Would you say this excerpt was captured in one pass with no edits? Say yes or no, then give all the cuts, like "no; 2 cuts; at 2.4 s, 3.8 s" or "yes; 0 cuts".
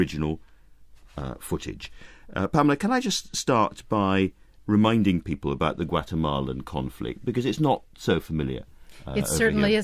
no; 1 cut; at 4.9 s